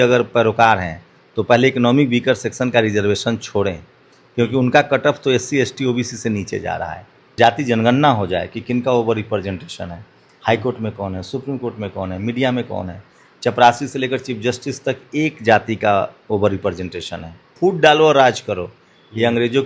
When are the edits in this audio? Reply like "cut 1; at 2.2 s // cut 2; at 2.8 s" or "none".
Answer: cut 1; at 7.3 s // cut 2; at 17.4 s